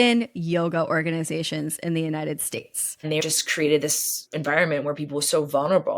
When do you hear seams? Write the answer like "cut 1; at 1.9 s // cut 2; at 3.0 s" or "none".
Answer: cut 1; at 3.2 s

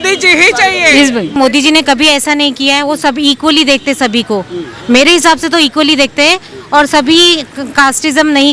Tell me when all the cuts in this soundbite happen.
cut 1; at 1.4 s

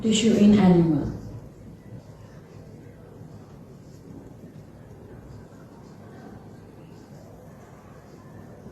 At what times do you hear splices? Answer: cut 1; at 7.3 s

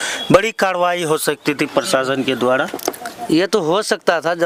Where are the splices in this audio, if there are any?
none

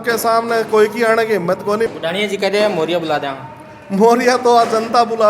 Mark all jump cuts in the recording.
none

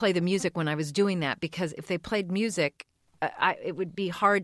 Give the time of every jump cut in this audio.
cut 1; at 3.0 s

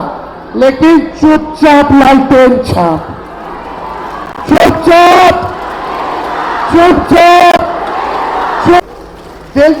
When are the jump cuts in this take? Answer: cut 1; at 8.8 s

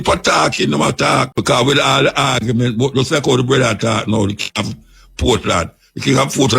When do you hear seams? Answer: cut 1; at 1.3 s

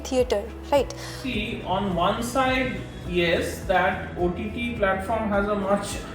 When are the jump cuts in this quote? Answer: cut 1; at 1.2 s

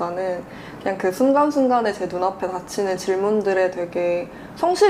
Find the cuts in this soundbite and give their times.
none

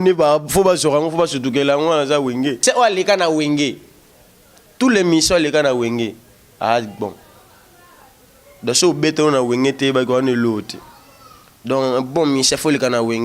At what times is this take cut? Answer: cut 1; at 2.6 s

